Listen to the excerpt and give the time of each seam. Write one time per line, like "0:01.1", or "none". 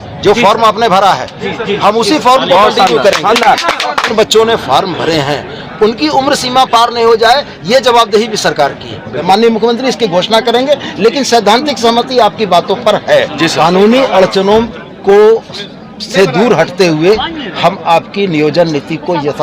0:04.1
0:09.2
0:13.5